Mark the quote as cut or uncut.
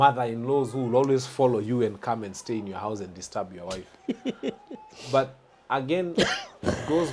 uncut